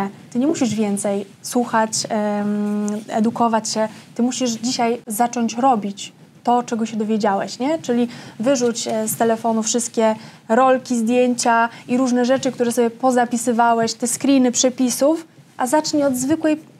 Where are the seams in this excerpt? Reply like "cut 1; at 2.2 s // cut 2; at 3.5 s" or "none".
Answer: none